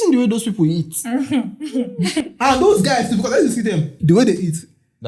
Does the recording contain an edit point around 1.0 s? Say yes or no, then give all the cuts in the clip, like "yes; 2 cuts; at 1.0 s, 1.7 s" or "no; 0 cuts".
no; 1 cut; at 3.9 s